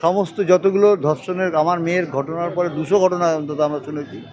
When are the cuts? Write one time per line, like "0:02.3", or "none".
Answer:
none